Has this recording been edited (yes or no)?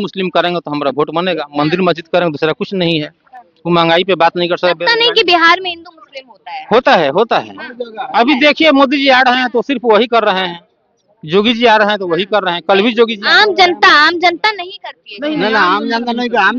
no